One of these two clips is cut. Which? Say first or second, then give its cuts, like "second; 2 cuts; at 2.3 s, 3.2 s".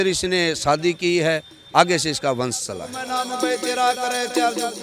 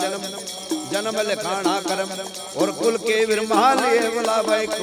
first; 1 cut; at 3.0 s